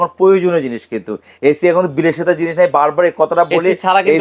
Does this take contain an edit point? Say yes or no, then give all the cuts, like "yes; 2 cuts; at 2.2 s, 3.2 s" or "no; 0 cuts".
no; 0 cuts